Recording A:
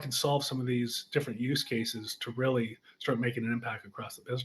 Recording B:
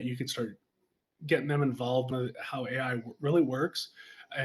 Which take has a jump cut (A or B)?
B